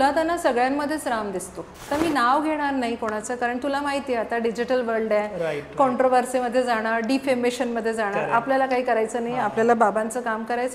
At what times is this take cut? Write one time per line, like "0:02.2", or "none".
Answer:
0:01.8